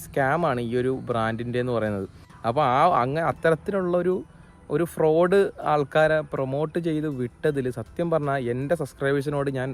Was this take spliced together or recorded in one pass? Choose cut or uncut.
uncut